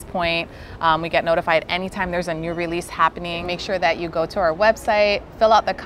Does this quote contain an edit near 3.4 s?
yes; 1 cut; at 3.4 s

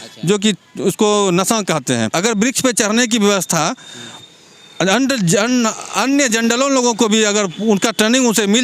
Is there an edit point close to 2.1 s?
yes; 1 cut; at 2.1 s

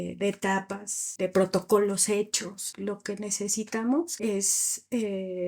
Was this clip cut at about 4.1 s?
yes; 3 cuts; at 1.0 s, 2.7 s, 4.1 s

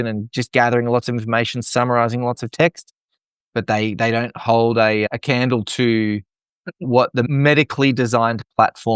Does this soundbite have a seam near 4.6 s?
no; 1 cut; at 7.3 s

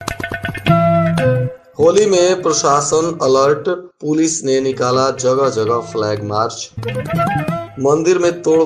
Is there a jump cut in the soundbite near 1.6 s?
yes; 1 cut; at 1.6 s

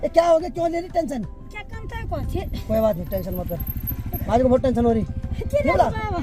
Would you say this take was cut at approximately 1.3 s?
no; 0 cuts

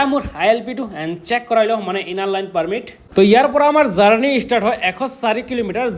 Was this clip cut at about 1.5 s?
no; 1 cut; at 3.0 s

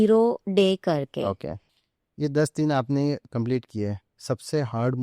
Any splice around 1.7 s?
yes; 1 cut; at 1.7 s

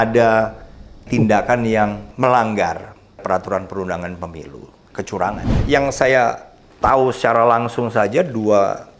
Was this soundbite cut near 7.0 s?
no; 3 cuts; at 1.1 s, 2.0 s, 5.0 s

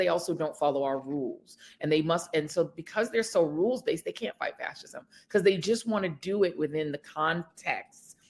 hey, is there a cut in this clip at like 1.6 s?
no; 0 cuts

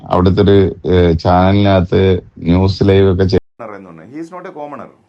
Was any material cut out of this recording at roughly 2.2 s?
no; 1 cut; at 3.4 s

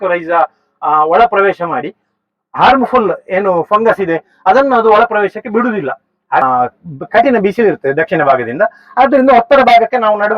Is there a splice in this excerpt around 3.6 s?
no; 1 cut; at 6.4 s

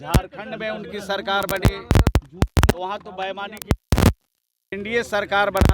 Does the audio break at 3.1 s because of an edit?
no; 1 cut; at 4.8 s

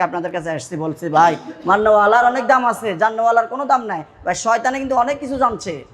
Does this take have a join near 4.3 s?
no; 0 cuts

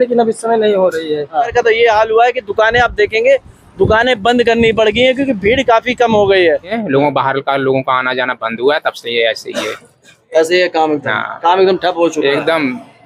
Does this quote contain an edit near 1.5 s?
yes; 2 cuts; at 1.5 s, 6.8 s

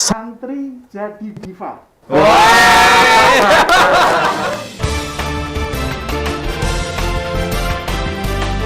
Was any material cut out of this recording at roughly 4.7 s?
yes; 1 cut; at 4.7 s

